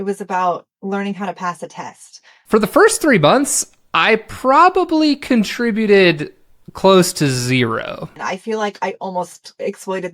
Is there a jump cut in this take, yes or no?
yes